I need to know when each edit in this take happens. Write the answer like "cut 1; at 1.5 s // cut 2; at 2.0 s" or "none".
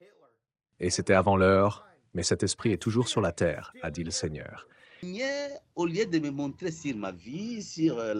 cut 1; at 5.1 s

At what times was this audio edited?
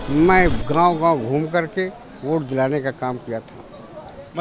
none

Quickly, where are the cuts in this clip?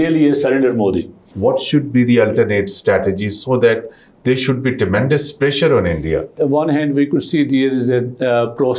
cut 1; at 1.3 s // cut 2; at 6.4 s

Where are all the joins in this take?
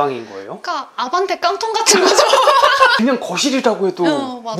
cut 1; at 2.9 s

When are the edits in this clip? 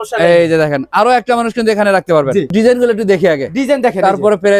cut 1; at 2.5 s

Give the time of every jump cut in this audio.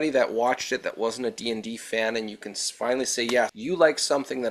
cut 1; at 3.6 s

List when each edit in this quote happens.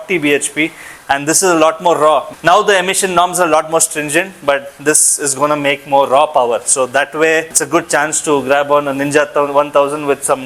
none

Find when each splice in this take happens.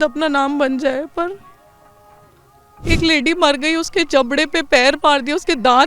cut 1; at 2.8 s

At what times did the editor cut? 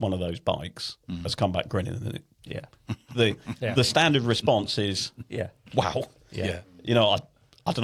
none

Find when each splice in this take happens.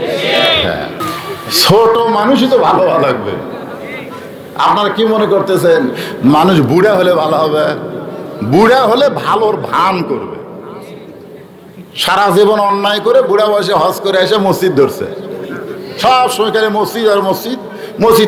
cut 1; at 1.0 s

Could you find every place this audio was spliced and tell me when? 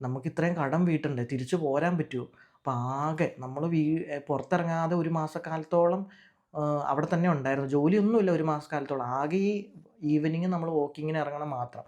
none

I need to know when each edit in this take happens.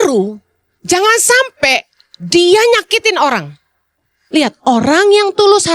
cut 1; at 4.1 s

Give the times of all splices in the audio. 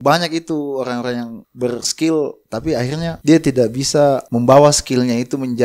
cut 1; at 1.4 s // cut 2; at 3.2 s // cut 3; at 4.3 s

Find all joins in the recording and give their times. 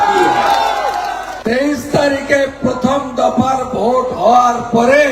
cut 1; at 1.3 s

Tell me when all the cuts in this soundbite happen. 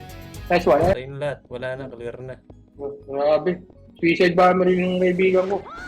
cut 1; at 1.0 s

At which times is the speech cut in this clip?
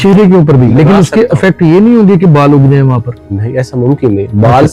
none

